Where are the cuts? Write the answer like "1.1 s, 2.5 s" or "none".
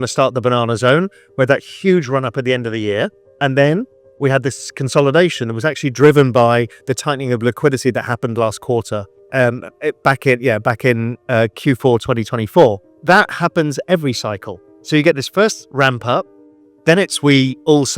3.2 s, 12.9 s